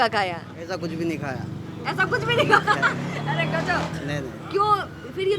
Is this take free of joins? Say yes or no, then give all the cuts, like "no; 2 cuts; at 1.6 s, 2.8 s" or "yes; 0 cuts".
yes; 0 cuts